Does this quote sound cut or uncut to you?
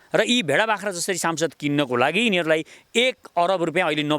uncut